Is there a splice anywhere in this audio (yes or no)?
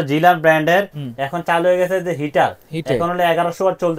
yes